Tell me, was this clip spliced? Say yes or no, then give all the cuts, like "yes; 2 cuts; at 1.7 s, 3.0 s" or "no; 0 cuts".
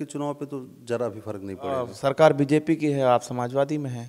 yes; 1 cut; at 1.8 s